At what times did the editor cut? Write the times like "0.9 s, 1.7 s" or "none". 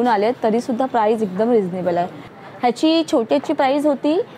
2.3 s